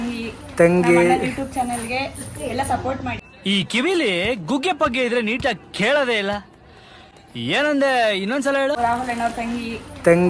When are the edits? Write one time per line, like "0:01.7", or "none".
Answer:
0:03.2
0:08.8